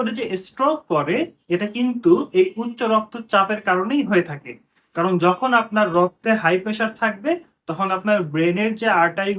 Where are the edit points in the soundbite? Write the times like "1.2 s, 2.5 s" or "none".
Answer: none